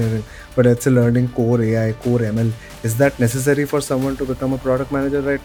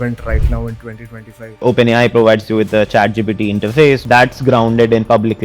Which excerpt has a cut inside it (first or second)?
second